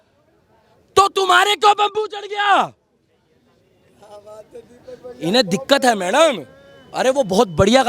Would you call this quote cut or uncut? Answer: uncut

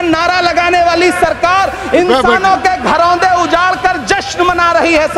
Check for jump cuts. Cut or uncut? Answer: uncut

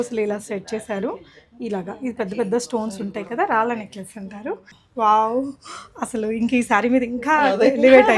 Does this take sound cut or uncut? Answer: cut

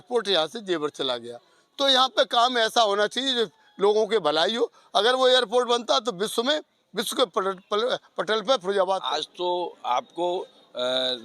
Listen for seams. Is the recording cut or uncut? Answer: cut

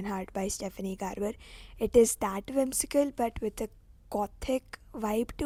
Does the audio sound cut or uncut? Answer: uncut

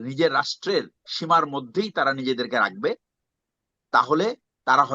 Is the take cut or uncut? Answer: uncut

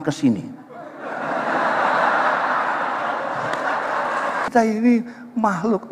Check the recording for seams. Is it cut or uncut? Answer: cut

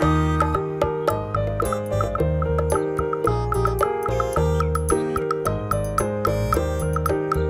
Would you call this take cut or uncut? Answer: uncut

